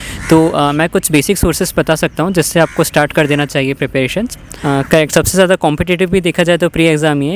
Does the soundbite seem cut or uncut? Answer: cut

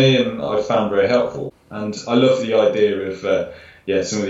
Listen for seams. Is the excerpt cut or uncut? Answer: cut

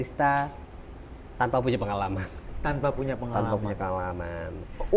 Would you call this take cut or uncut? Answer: uncut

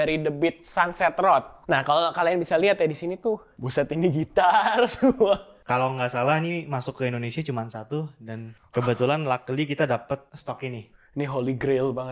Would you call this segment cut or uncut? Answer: cut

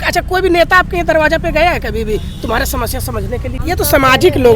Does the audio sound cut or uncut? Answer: cut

